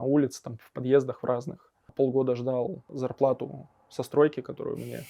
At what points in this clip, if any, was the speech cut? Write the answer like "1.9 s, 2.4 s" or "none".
1.8 s, 2.8 s